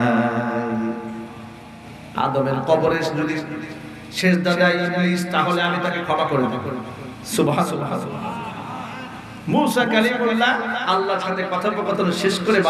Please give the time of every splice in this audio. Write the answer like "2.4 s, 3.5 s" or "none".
none